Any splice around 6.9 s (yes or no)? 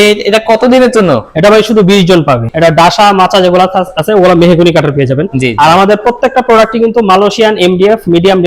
no